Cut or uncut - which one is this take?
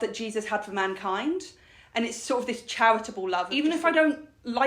cut